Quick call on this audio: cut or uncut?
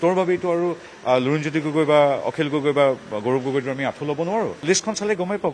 cut